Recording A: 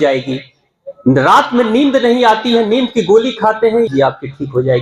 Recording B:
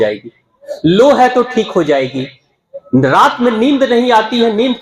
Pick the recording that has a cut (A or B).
A